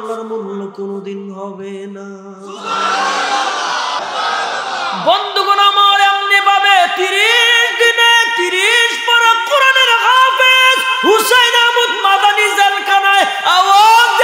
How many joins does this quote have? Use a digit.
1